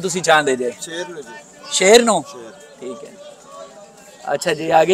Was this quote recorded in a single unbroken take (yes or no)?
yes